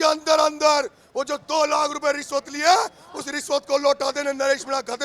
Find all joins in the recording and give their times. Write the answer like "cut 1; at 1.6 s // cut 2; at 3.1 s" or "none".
none

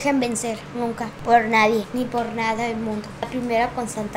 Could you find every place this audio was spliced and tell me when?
cut 1; at 1.1 s // cut 2; at 1.9 s // cut 3; at 3.3 s

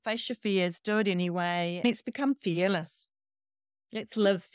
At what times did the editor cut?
cut 1; at 1.8 s

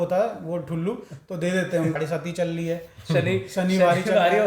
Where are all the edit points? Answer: cut 1; at 1.9 s

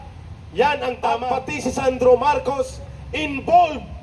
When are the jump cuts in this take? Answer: cut 1; at 1.2 s

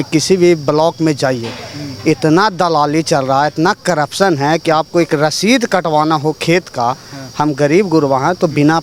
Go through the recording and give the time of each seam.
none

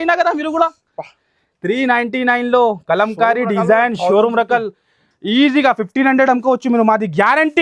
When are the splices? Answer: none

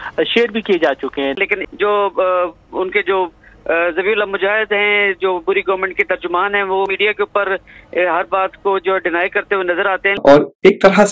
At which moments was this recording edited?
cut 1; at 1.4 s // cut 2; at 10.1 s

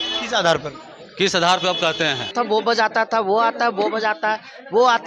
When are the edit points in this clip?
cut 1; at 2.3 s

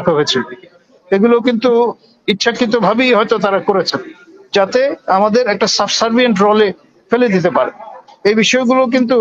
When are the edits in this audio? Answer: none

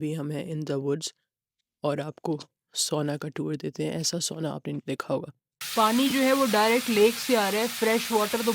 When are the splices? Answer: cut 1; at 5.6 s

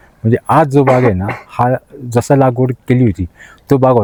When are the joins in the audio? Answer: none

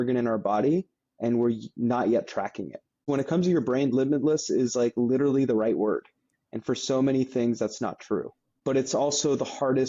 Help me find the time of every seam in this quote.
cut 1; at 3.0 s // cut 2; at 8.5 s

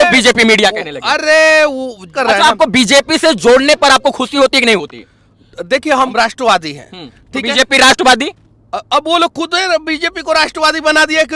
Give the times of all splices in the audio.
cut 1; at 2.1 s // cut 2; at 6.1 s

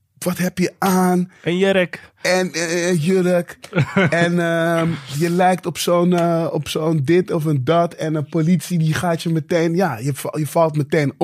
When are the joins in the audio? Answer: none

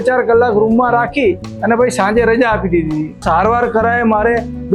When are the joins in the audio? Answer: cut 1; at 3.2 s

